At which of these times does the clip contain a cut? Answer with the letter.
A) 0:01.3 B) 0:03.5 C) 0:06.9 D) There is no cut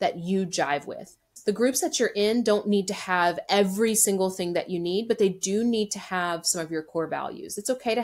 A